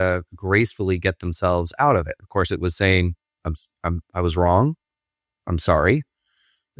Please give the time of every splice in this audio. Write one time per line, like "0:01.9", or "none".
none